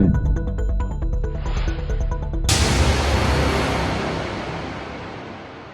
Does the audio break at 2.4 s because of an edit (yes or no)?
yes